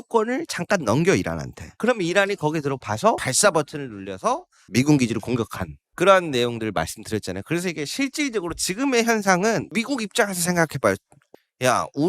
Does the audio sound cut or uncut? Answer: cut